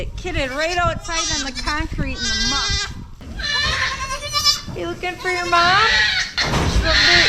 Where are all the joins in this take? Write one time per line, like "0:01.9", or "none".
0:03.3
0:06.3